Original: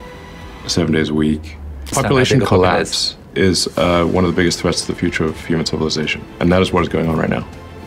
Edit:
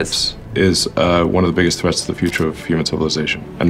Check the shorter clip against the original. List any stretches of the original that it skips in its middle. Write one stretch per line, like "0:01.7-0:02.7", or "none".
none